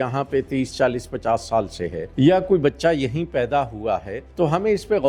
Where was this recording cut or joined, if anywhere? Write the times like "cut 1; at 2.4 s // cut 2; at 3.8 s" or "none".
cut 1; at 2.0 s // cut 2; at 4.2 s